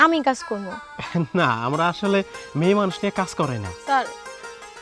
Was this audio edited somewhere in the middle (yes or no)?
no